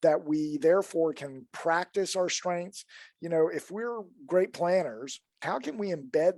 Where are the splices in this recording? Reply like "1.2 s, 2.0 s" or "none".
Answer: 5.3 s